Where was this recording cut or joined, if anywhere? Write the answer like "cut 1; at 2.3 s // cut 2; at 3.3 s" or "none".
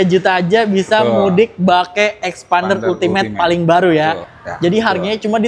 cut 1; at 4.3 s